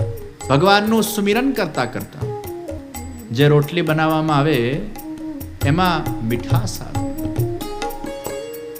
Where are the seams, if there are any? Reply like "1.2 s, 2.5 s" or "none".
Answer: 2.9 s